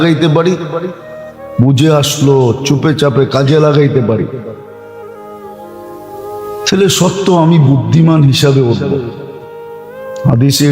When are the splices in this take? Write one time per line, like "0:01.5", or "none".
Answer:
0:04.5
0:06.1